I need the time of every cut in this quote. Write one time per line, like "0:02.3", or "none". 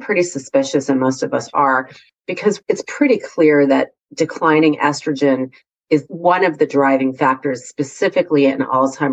0:02.6
0:06.1